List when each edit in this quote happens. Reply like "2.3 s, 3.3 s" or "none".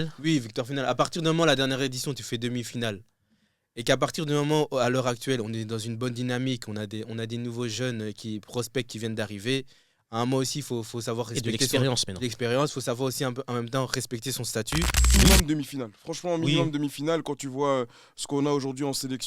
15.1 s